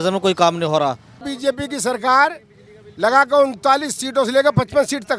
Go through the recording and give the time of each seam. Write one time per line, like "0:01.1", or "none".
0:01.3